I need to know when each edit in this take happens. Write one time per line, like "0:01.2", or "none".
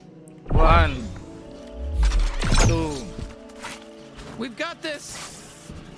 none